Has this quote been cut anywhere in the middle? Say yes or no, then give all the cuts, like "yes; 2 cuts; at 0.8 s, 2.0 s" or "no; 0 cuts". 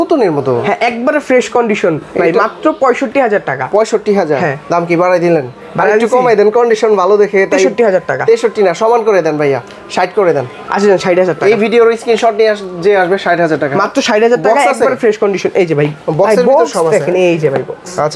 no; 0 cuts